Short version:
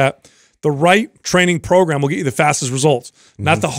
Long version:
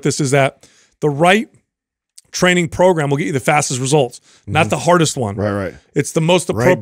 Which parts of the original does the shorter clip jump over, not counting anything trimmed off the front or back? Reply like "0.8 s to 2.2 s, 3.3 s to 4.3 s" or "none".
1.5 s to 2.3 s

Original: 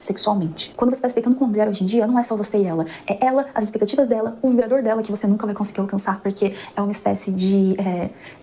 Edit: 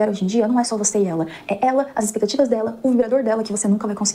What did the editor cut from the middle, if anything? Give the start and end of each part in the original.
none

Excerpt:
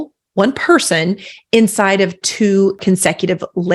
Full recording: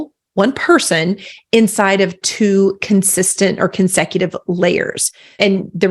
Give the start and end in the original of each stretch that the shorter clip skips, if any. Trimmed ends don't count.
2.8 s to 3.7 s

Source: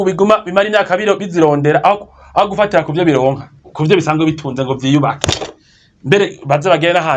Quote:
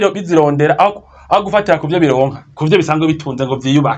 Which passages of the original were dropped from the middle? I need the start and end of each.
3.5 s to 3.6 s

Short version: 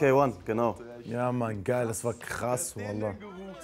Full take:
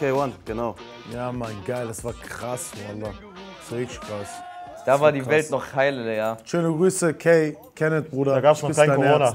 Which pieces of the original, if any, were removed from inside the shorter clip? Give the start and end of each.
none

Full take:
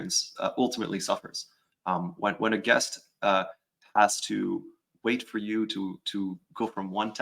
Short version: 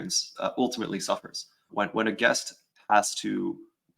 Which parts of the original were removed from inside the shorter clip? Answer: 1.6 s to 2.1 s, 3.0 s to 3.6 s

